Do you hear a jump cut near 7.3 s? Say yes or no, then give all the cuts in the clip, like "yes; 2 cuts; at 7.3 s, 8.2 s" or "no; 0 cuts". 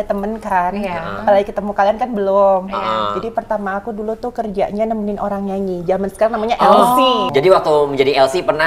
yes; 1 cut; at 7.3 s